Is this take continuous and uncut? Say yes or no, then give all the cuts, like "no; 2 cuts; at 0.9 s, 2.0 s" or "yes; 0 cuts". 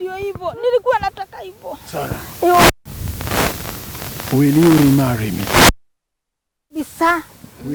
yes; 0 cuts